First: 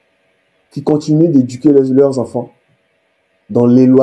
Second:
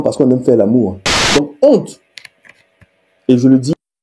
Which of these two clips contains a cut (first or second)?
second